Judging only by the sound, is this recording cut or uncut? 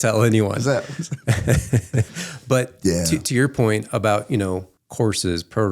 cut